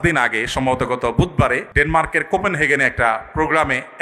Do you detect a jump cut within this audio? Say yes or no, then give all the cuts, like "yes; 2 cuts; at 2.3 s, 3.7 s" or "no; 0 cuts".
yes; 1 cut; at 1.7 s